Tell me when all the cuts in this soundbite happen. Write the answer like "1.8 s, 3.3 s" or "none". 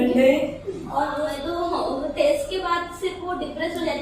1.1 s

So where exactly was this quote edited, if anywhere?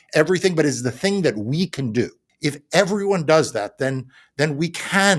2.2 s

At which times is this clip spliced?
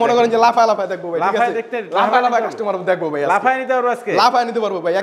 none

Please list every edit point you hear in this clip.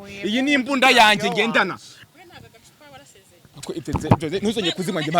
1.9 s

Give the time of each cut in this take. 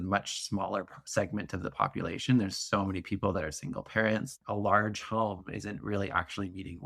3.3 s, 4.3 s

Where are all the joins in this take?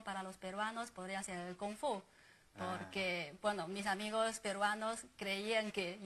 3.6 s

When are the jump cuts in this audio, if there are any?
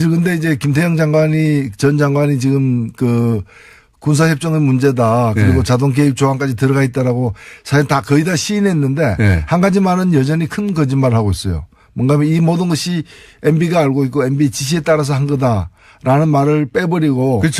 11.6 s

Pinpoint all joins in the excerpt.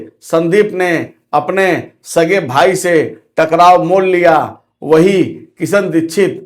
none

